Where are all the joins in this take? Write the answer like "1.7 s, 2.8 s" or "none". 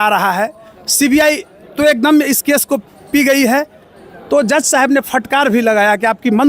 none